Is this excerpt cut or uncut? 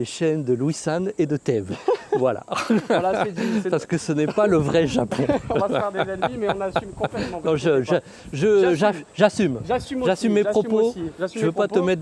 uncut